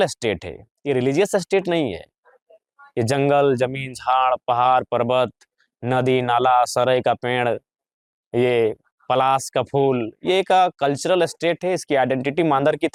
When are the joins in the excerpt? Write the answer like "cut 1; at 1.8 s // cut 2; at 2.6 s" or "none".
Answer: none